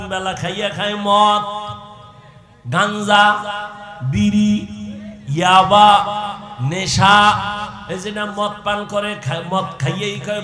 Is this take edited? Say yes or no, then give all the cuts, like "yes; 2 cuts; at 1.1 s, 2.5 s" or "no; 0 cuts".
no; 0 cuts